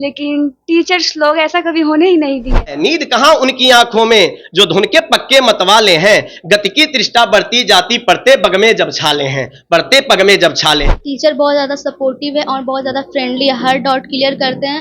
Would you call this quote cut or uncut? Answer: cut